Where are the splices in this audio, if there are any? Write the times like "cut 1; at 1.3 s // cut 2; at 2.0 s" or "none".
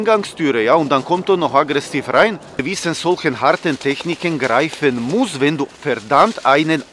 cut 1; at 2.7 s